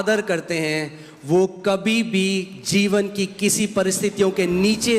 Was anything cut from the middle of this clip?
no; 0 cuts

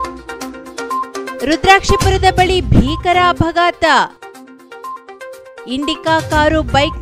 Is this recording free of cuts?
no; 1 cut; at 1.3 s

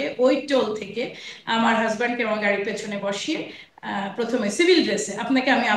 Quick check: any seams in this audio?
no; 0 cuts

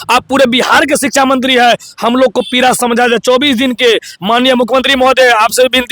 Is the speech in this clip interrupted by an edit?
no; 0 cuts

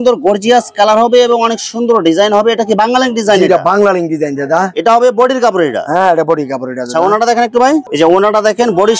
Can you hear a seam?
no; 0 cuts

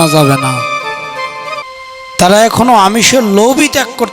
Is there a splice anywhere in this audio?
yes; 1 cut; at 1.6 s

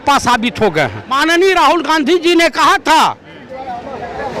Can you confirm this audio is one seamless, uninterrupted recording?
no; 1 cut; at 1.1 s

